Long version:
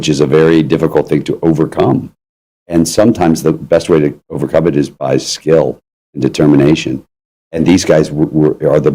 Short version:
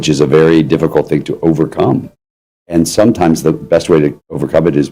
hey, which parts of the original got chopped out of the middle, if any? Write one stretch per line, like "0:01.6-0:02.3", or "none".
none